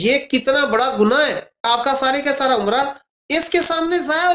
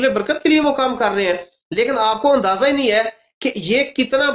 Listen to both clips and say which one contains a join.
first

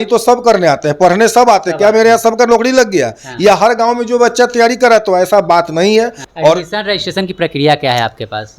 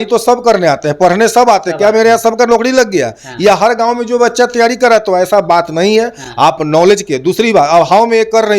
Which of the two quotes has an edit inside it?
first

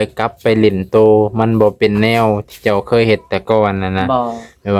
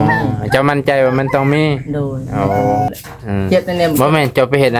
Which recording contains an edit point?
second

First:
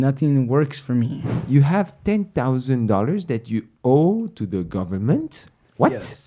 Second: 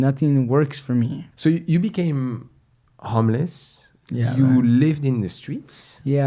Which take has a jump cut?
first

